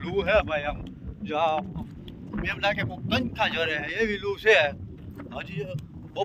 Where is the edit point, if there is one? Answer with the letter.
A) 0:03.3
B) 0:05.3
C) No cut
C